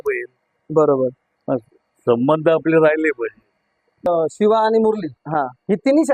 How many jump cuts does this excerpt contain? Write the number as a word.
one